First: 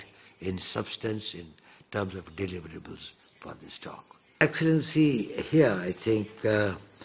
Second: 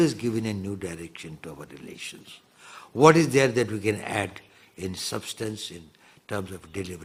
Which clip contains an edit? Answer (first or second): first